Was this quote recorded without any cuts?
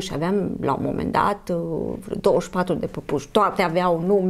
yes; 0 cuts

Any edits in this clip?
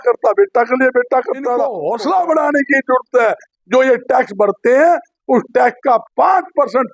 yes; 1 cut; at 1.8 s

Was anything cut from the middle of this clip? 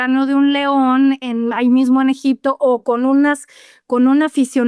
no; 0 cuts

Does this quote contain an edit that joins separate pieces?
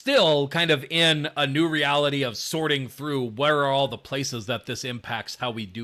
no; 0 cuts

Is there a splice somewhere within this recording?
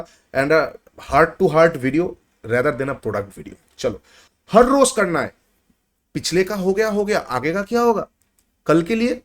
yes; 1 cut; at 4.2 s

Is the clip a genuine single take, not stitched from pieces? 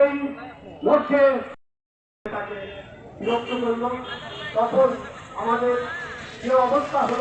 no; 1 cut; at 1.6 s

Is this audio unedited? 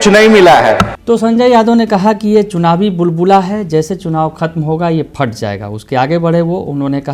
yes; 0 cuts

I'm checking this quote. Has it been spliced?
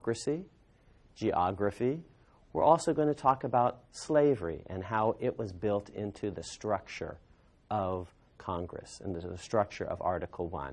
no; 0 cuts

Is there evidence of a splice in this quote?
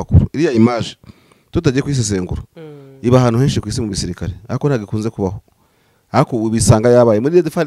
no; 0 cuts

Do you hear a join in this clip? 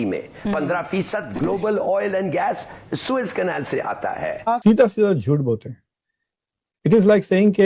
yes; 1 cut; at 4.6 s

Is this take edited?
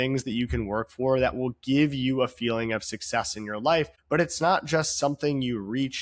yes; 1 cut; at 4.0 s

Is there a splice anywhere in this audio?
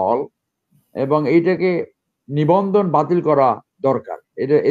no; 0 cuts

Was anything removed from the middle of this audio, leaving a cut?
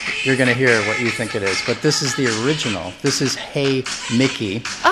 no; 0 cuts

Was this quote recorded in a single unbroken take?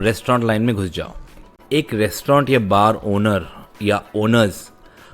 no; 1 cut; at 1.3 s

